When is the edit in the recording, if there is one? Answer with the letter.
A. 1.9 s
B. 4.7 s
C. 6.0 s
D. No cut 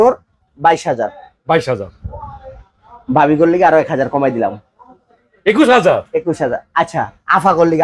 D